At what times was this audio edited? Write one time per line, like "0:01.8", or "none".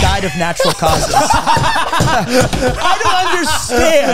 none